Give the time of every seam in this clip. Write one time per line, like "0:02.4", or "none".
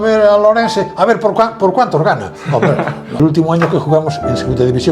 0:03.2